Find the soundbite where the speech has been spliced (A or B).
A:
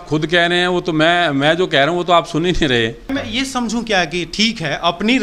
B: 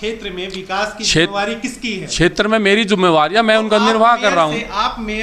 A